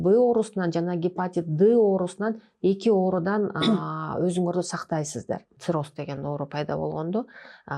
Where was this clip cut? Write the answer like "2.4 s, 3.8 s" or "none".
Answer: 5.5 s